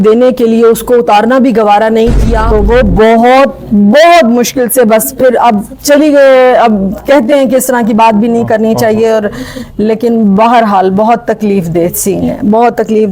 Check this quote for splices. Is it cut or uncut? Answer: cut